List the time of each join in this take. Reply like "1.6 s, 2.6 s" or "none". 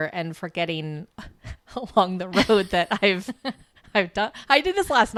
none